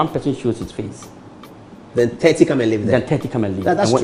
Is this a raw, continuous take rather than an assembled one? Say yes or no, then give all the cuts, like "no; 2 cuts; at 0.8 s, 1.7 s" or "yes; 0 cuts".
yes; 0 cuts